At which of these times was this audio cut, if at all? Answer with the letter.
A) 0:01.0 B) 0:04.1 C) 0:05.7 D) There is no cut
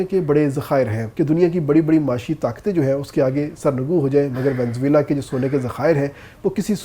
A